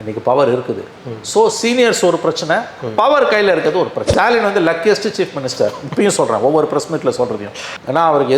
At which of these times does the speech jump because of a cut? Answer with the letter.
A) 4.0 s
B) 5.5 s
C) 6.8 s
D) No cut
A